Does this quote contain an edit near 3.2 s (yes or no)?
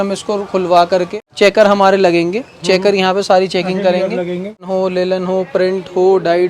no